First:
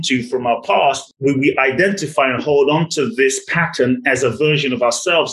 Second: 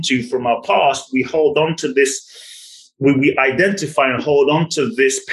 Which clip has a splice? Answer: first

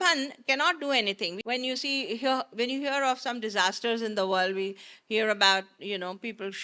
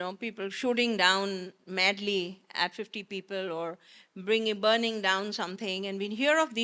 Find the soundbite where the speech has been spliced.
first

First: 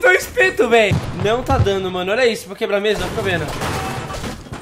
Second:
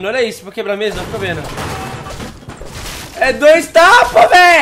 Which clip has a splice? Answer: first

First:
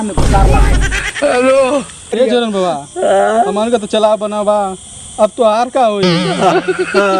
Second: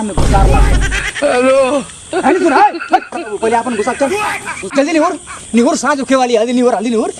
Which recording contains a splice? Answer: first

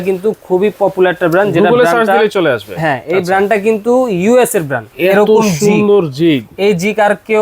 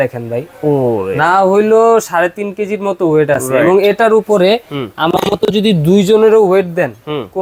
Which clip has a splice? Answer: first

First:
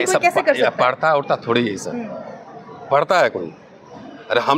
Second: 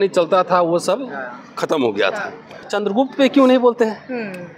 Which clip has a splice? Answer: second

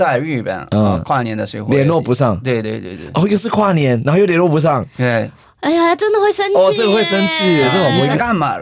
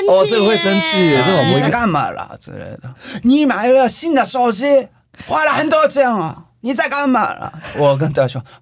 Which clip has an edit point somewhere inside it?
second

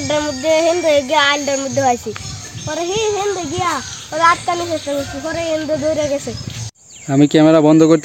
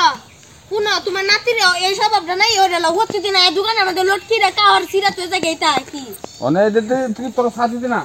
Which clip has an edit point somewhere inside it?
first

